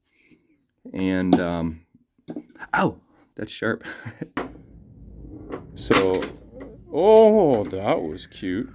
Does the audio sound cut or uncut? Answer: cut